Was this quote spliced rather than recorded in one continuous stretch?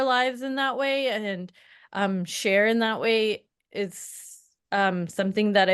no; 0 cuts

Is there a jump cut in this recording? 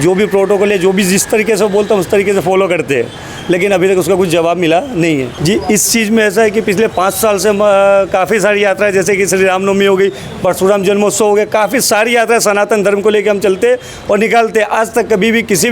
yes; 1 cut; at 5.3 s

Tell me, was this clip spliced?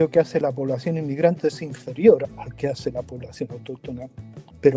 no; 0 cuts

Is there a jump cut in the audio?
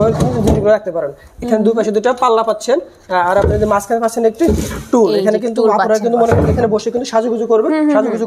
no; 0 cuts

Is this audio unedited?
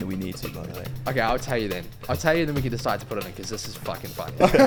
yes; 0 cuts

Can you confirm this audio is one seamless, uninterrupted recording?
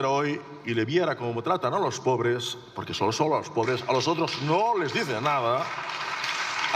yes; 0 cuts

